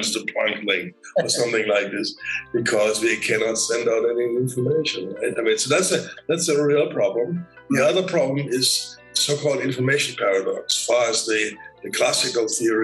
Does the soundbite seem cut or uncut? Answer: cut